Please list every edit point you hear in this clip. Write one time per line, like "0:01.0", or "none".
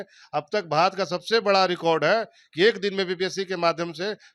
none